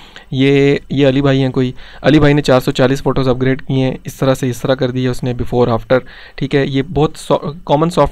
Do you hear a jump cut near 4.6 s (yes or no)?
no